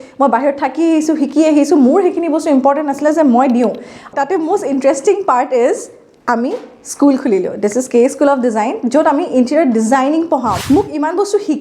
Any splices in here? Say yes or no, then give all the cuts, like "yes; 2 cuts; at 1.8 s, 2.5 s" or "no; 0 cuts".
yes; 1 cut; at 10.6 s